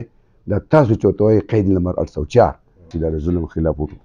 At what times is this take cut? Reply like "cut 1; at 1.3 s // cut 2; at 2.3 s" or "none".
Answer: cut 1; at 2.8 s